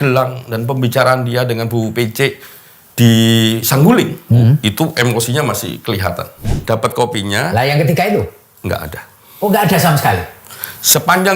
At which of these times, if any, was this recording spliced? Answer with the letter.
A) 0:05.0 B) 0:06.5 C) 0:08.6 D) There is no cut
B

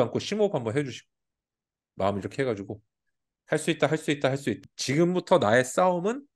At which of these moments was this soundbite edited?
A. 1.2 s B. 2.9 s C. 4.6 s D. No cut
C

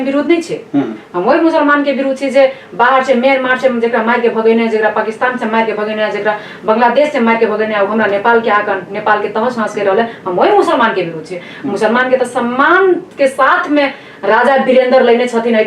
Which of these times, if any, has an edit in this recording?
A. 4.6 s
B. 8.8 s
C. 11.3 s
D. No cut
D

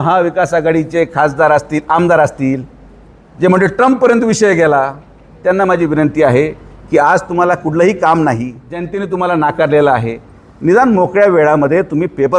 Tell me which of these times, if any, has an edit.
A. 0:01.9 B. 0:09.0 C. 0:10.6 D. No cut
B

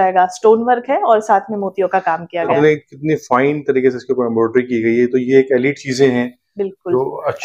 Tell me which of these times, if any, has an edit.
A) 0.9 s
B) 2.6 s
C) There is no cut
B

